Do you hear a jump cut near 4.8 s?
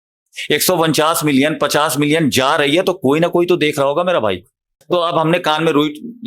yes; 1 cut; at 4.8 s

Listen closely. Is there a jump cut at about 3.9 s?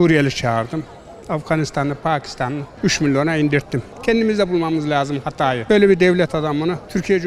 yes; 1 cut; at 3.9 s

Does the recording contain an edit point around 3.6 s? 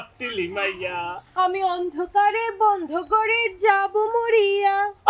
no; 0 cuts

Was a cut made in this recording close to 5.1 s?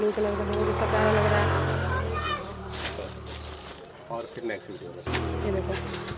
yes; 1 cut; at 5.1 s

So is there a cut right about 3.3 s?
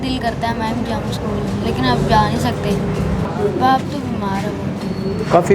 yes; 1 cut; at 3.3 s

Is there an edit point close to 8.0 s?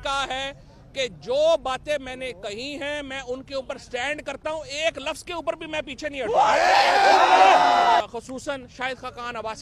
yes; 1 cut; at 8.0 s

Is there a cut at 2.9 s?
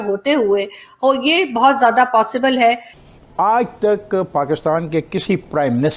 yes; 1 cut; at 2.9 s

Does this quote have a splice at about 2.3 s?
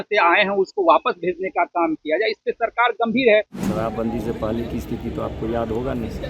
no; 1 cut; at 3.6 s

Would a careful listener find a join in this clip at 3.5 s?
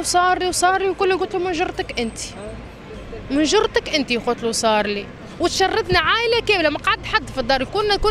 no; 0 cuts

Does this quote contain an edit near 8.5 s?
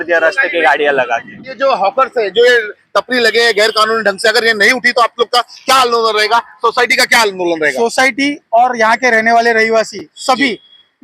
no; 1 cut; at 1.4 s

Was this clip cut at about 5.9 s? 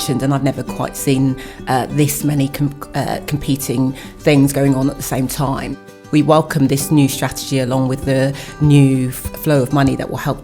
yes; 1 cut; at 5.9 s

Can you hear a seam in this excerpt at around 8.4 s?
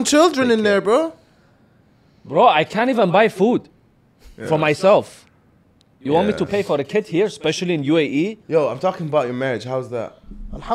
yes; 1 cut; at 8.4 s

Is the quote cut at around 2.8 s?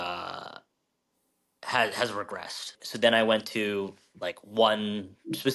yes; 1 cut; at 2.8 s

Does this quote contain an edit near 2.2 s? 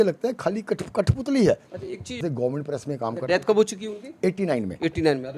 yes; 1 cut; at 2.2 s

